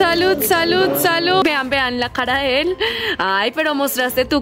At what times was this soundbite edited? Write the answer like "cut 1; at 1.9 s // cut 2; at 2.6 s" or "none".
cut 1; at 1.4 s